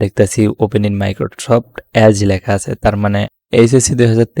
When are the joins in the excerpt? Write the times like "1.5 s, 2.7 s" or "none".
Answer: 3.3 s